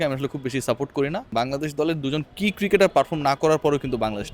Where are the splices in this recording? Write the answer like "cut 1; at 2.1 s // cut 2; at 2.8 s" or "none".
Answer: cut 1; at 1.3 s